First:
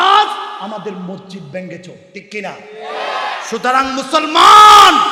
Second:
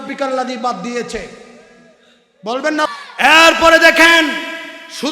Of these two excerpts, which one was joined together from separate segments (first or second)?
second